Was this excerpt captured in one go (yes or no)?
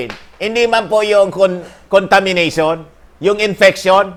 yes